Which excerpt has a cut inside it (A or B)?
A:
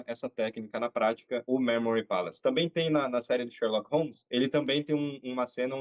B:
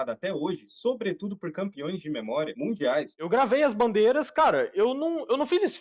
B